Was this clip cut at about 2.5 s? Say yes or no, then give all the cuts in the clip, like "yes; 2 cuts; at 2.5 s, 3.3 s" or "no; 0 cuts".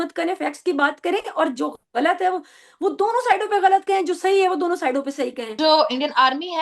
no; 1 cut; at 5.4 s